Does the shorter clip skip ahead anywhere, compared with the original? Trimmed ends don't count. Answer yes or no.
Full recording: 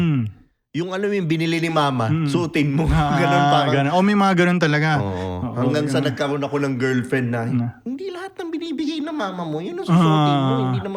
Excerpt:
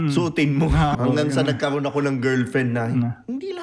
yes